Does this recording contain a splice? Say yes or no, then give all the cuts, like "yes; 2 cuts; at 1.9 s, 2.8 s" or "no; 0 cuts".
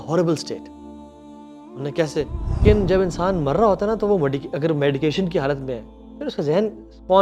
yes; 1 cut; at 2.6 s